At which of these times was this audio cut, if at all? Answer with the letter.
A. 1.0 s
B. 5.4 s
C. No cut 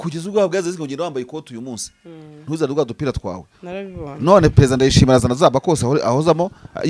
C